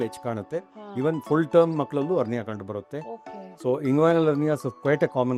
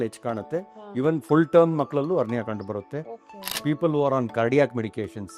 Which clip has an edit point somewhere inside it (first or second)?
second